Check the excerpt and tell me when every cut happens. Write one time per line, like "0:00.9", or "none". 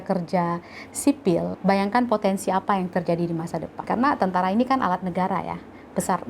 0:01.5
0:03.7